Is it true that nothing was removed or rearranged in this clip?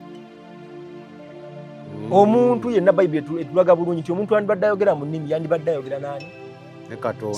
no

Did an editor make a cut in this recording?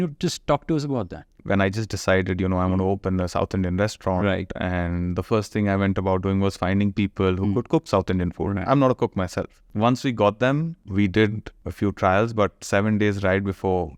yes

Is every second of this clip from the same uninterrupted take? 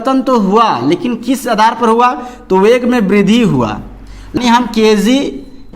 no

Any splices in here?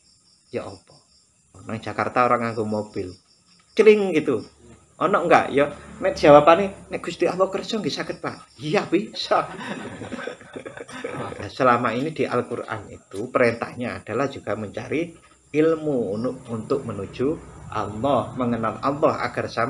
yes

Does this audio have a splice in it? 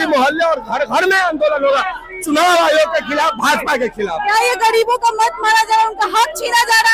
no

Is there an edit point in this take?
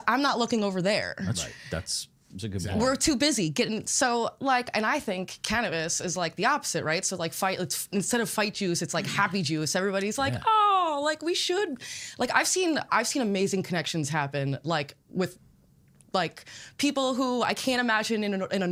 no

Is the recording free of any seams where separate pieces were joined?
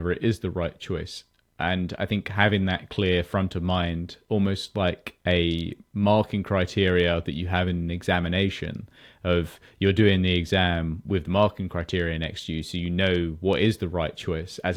yes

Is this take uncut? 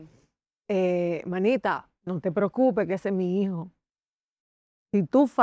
yes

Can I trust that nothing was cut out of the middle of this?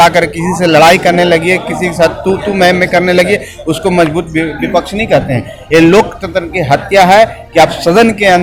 yes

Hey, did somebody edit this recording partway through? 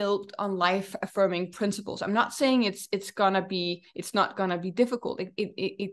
no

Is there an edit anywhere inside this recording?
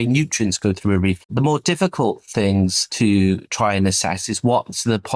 yes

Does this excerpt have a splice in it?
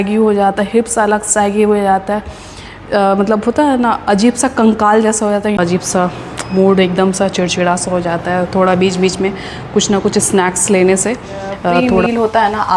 yes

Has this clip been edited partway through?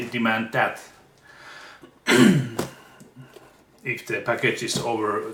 no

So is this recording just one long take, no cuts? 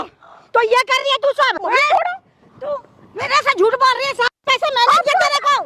no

